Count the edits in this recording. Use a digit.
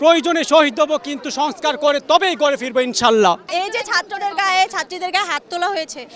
0